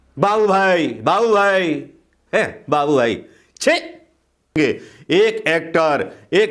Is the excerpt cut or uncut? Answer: cut